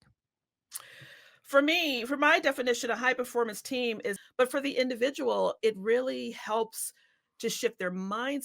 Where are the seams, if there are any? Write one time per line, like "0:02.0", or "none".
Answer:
0:04.2